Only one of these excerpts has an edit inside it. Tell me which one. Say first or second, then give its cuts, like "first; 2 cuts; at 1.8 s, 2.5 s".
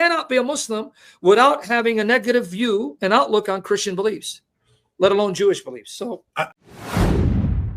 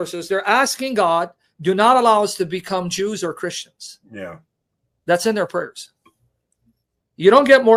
first; 1 cut; at 6.5 s